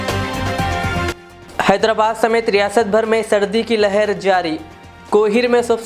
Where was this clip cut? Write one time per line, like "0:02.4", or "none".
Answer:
0:01.1